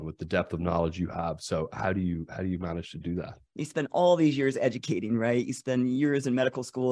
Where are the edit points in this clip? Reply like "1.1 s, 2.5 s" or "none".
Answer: 3.4 s